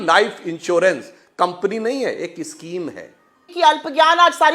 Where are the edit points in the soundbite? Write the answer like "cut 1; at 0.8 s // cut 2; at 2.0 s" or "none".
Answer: cut 1; at 3.4 s